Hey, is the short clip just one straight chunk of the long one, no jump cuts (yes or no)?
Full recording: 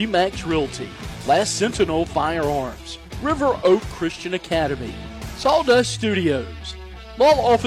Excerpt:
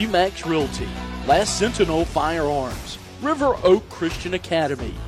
yes